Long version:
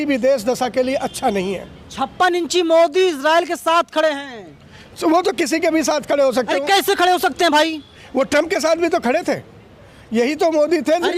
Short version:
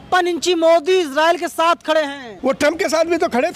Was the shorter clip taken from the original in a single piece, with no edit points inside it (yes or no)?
no